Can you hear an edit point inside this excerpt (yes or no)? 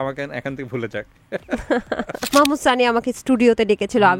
yes